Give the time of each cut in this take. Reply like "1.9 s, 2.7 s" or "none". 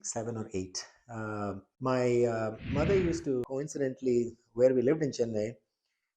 3.4 s